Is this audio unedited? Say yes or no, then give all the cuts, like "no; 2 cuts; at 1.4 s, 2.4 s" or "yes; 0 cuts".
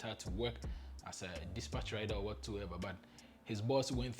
yes; 0 cuts